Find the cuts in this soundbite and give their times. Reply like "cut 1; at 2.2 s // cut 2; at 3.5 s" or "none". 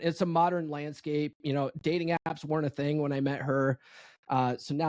none

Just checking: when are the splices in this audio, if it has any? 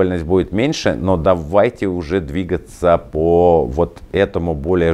none

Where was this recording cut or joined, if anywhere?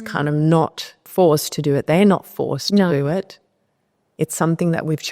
cut 1; at 1.0 s

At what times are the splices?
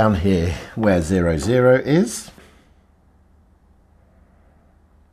cut 1; at 2.4 s

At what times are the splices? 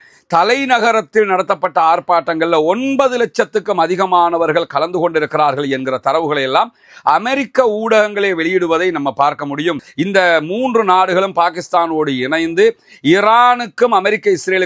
cut 1; at 9.9 s

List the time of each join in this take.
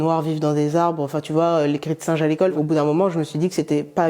cut 1; at 2.5 s

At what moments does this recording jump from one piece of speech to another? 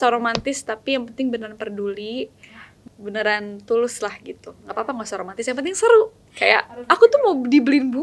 cut 1; at 2.7 s // cut 2; at 6.2 s

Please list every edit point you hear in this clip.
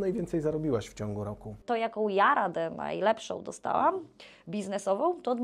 cut 1; at 1.6 s

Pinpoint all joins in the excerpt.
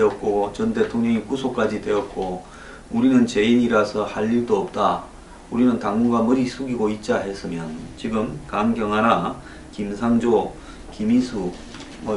none

